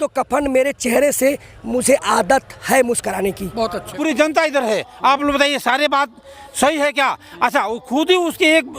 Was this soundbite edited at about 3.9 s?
yes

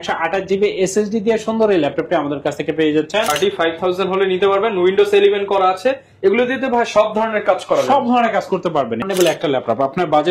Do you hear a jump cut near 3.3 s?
yes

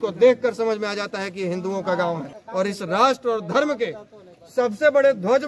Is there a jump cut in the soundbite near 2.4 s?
yes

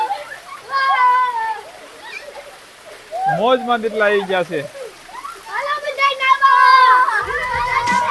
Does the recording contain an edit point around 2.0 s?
no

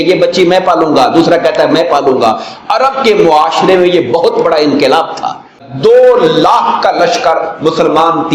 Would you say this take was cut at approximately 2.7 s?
no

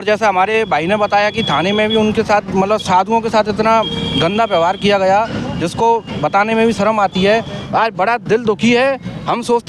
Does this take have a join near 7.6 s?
yes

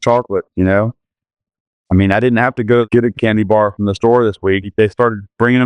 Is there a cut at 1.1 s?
no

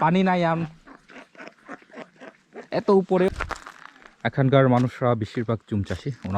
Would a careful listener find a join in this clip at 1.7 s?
no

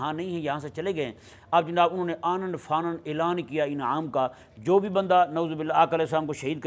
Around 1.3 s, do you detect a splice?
no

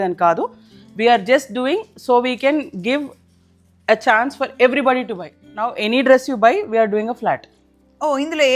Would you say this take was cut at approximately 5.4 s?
yes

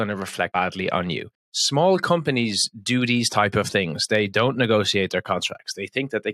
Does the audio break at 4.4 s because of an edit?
no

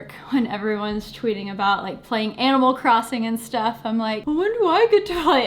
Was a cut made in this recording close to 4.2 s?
yes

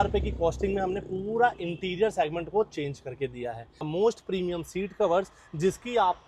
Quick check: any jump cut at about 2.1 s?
no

